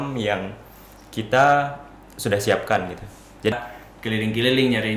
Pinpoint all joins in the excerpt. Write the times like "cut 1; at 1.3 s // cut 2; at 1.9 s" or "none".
cut 1; at 3.5 s